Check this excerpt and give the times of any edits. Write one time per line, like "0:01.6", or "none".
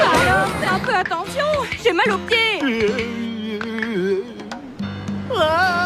0:03.1